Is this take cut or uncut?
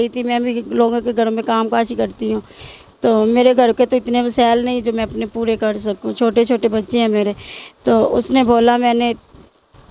uncut